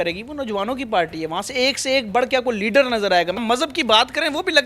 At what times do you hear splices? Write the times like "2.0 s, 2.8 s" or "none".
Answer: 3.4 s